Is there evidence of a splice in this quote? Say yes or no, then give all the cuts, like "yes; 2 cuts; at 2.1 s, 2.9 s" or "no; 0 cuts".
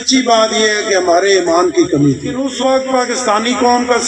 yes; 1 cut; at 2.5 s